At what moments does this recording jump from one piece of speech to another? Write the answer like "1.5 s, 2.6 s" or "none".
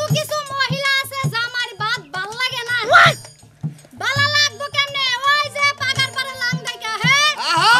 none